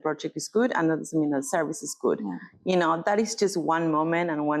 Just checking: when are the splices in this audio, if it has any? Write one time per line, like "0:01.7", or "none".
none